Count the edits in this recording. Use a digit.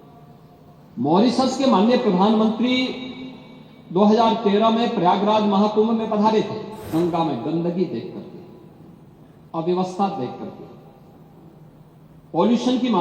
1